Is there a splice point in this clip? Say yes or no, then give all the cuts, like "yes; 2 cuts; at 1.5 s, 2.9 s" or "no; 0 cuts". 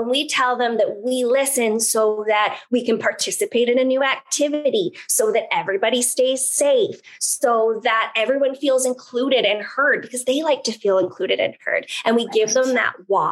no; 0 cuts